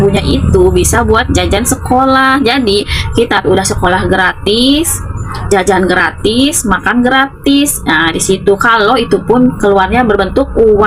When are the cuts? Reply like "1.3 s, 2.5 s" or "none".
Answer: none